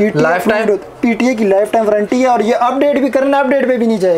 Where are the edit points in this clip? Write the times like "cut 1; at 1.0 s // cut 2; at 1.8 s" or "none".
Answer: none